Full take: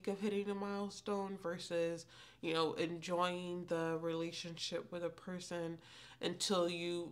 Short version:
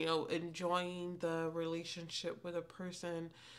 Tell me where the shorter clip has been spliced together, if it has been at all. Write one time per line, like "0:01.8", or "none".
none